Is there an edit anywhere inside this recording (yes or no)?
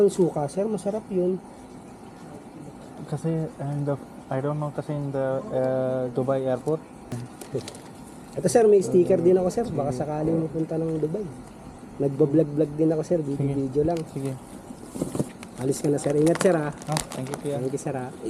yes